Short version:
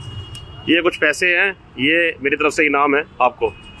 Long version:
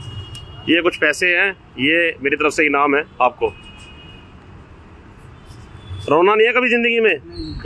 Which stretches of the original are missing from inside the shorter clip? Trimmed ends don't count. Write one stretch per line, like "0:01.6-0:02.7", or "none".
none